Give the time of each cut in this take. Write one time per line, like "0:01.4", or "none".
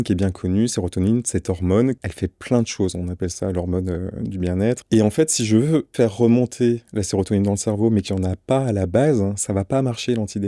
0:02.0
0:04.8
0:05.9

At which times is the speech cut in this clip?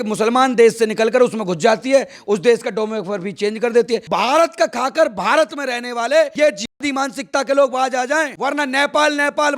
0:04.1

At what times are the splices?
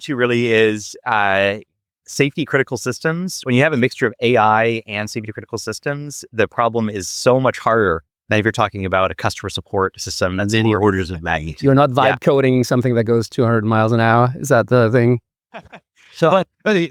none

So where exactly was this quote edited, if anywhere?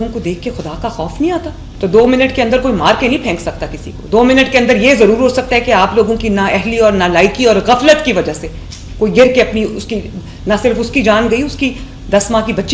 0:01.6

